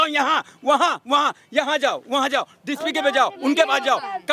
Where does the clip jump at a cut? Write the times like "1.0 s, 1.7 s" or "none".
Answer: none